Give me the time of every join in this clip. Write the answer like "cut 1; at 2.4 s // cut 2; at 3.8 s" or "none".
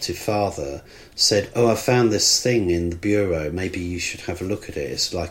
none